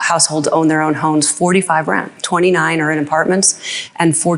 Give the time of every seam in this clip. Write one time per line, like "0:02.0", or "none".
0:02.1